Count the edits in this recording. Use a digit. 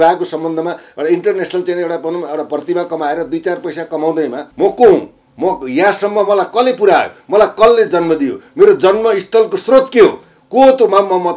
1